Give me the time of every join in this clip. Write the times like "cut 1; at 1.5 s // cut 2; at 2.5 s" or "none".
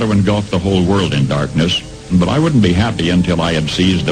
cut 1; at 2.1 s